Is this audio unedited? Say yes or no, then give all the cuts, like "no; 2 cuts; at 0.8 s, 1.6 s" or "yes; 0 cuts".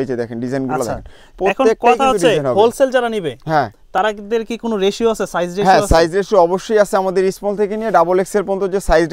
yes; 0 cuts